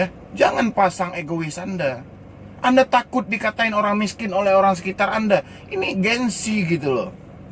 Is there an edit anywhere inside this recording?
no; 0 cuts

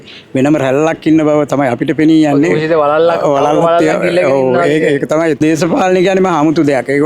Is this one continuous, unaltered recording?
no; 1 cut; at 5.4 s

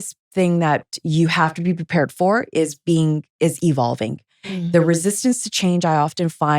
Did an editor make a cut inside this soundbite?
yes; 1 cut; at 0.9 s

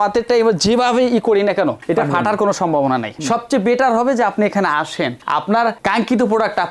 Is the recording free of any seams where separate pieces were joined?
no; 1 cut; at 3.1 s

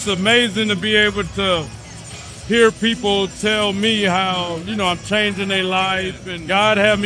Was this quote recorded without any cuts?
yes; 0 cuts

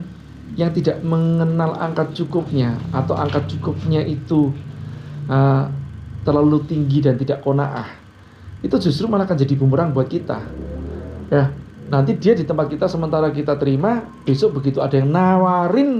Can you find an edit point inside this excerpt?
no; 0 cuts

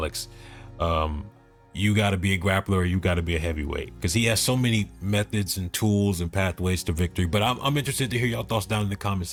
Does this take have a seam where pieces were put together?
no; 0 cuts

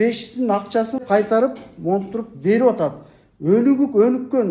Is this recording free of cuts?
no; 1 cut; at 1.0 s

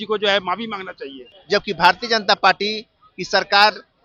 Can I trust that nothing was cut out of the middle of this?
no; 1 cut; at 1.3 s

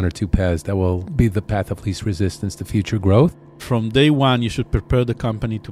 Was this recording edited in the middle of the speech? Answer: yes; 2 cuts; at 1.1 s, 3.6 s

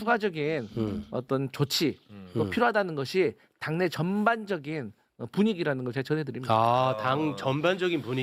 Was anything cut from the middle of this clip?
no; 0 cuts

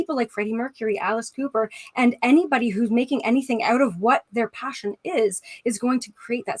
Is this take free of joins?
yes; 0 cuts

